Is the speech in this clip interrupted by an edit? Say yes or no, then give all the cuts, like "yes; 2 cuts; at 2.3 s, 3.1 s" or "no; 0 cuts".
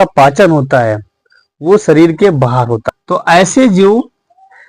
yes; 1 cut; at 2.8 s